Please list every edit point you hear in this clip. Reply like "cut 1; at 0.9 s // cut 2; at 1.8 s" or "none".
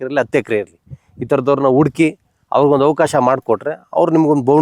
none